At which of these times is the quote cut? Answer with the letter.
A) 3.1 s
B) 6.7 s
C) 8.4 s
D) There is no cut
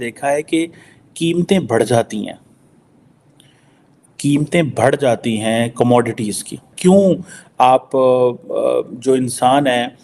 B